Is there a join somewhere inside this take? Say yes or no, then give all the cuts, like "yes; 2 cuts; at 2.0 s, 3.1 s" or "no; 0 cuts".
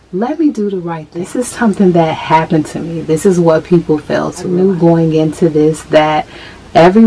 yes; 2 cuts; at 1.4 s, 4.5 s